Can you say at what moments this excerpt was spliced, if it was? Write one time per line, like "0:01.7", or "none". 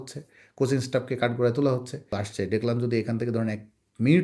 0:02.2

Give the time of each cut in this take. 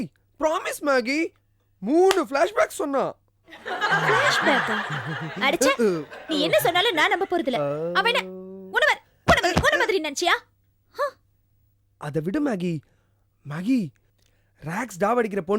none

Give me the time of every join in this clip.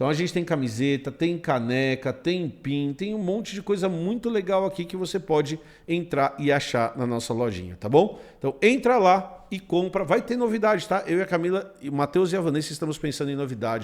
none

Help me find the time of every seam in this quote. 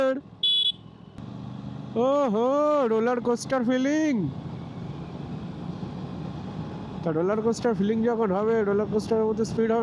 0:01.2

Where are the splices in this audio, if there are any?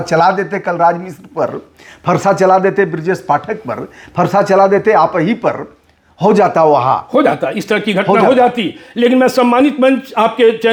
none

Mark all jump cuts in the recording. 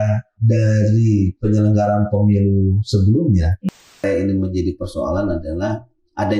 0:04.0

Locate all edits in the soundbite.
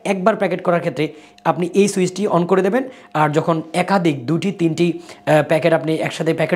none

